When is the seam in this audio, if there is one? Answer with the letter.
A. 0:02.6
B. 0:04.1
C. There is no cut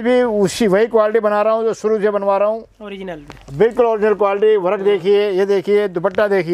C